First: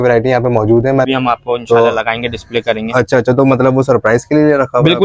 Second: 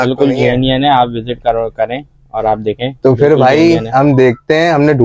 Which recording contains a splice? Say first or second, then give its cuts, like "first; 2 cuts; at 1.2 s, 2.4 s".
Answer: first; 1 cut; at 1.1 s